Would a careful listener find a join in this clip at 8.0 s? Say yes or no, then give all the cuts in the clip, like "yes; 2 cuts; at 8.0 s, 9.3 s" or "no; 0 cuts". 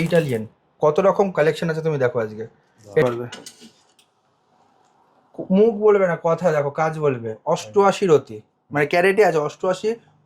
no; 1 cut; at 3.0 s